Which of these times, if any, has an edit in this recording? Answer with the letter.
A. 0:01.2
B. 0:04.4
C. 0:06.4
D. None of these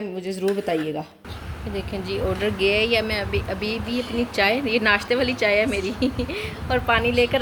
D